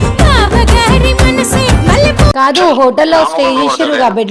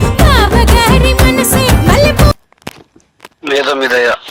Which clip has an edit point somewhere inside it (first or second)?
first